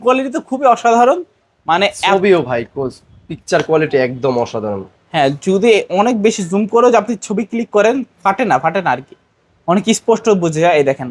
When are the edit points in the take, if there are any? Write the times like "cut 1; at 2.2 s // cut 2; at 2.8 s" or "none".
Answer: none

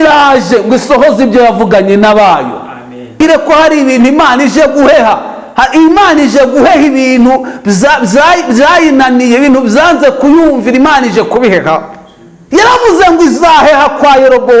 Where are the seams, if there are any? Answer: cut 1; at 3.2 s

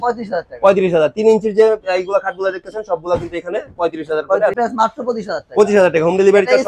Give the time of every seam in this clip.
cut 1; at 4.5 s

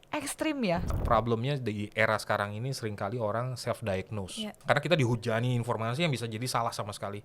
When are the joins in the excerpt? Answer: cut 1; at 0.9 s // cut 2; at 4.5 s

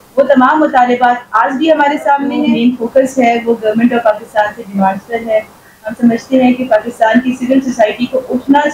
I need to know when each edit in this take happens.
cut 1; at 2.3 s

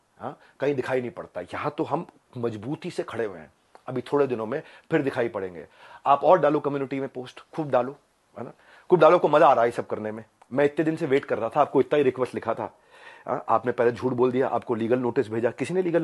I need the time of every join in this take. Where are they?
none

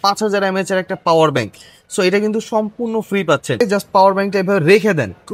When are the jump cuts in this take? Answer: cut 1; at 3.6 s

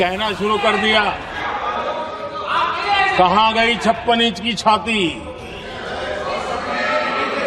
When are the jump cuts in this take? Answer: none

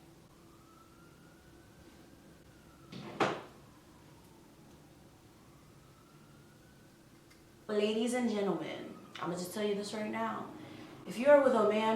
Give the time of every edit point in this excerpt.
cut 1; at 7.7 s

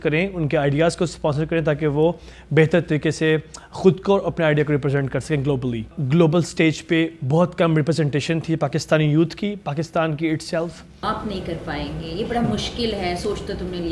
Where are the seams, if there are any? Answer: cut 1; at 5.9 s // cut 2; at 10.9 s

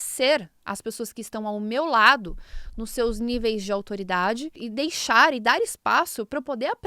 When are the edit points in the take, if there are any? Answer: cut 1; at 4.6 s

